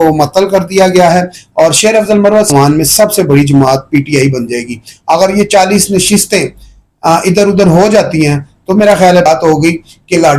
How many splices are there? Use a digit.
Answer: 2